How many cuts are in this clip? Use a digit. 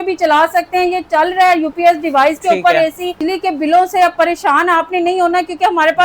1